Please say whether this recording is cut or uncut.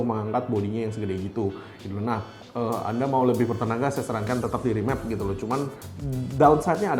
uncut